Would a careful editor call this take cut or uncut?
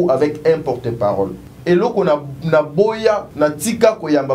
cut